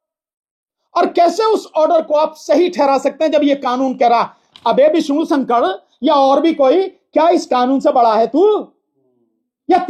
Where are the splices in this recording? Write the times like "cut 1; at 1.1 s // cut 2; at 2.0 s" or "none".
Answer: none